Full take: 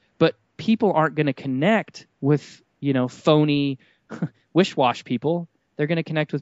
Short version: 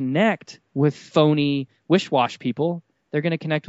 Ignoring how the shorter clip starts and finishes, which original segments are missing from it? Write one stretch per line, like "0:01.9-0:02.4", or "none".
0:02.5-0:03.1
0:03.9-0:04.4